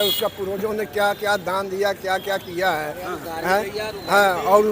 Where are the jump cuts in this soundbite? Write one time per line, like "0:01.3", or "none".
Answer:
none